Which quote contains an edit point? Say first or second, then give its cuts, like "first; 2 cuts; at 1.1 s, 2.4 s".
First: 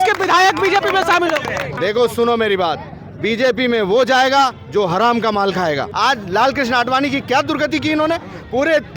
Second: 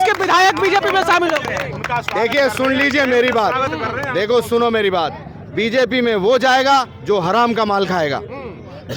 first; 2 cuts; at 1.7 s, 5.9 s